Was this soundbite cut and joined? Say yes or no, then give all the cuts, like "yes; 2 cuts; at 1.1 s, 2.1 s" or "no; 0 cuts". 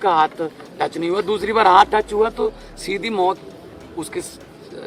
no; 0 cuts